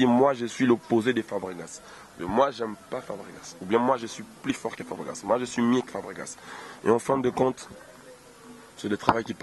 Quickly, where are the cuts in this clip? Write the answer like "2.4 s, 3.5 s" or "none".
none